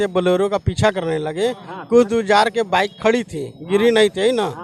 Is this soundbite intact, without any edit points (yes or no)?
yes